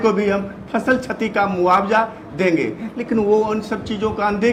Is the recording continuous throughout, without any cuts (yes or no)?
yes